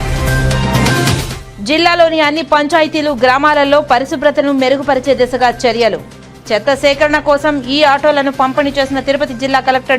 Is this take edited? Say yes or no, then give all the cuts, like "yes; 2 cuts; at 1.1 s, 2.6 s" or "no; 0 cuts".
yes; 1 cut; at 1.3 s